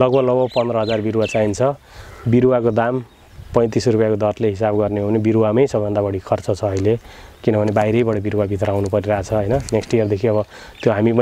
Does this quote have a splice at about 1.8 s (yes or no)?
no